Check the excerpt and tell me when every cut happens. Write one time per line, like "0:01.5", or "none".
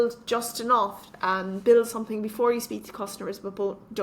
none